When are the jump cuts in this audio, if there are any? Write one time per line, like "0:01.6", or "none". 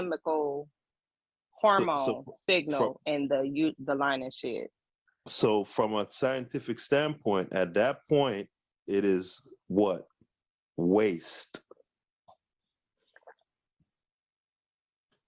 0:12.8